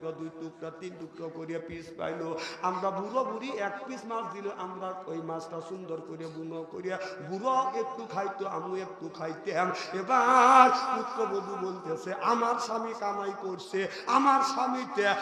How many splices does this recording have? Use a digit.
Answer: 0